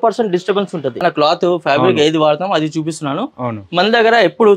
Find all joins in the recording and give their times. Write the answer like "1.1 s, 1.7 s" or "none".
1.0 s